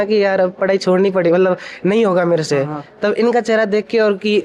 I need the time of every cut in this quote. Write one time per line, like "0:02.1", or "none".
none